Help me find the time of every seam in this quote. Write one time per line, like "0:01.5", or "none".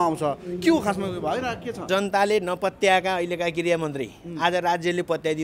0:01.9